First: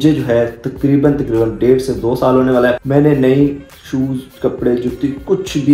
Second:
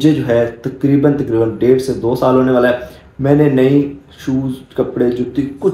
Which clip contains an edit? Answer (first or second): first